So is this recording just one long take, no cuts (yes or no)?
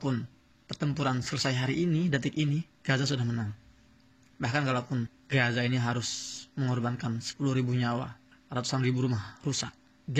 yes